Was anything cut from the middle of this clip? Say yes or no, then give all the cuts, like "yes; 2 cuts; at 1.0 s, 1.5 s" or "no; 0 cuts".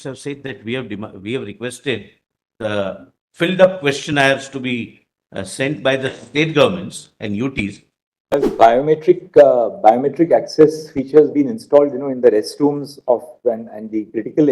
yes; 1 cut; at 8.3 s